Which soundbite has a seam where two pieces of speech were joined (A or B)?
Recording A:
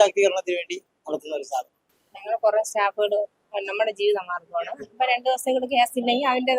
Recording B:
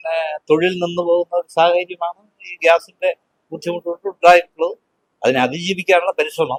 A